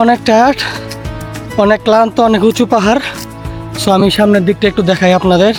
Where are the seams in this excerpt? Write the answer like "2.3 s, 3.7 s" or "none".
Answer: none